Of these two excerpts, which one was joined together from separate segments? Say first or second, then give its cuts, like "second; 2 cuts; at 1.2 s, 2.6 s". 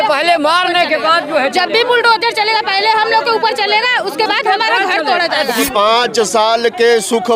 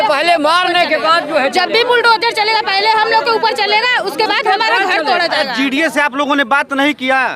first; 1 cut; at 5.7 s